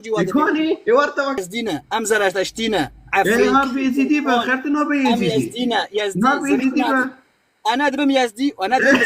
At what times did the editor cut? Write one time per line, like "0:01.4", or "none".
0:01.4